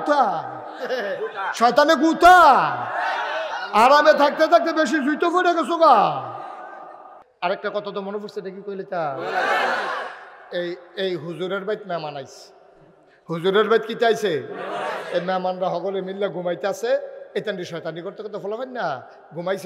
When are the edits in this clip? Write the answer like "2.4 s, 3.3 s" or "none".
7.3 s